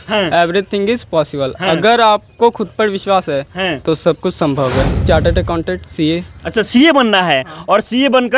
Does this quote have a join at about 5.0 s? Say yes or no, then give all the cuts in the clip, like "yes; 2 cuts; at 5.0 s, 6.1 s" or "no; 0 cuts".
yes; 1 cut; at 5.0 s